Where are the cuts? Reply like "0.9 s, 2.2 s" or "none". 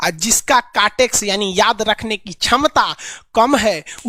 none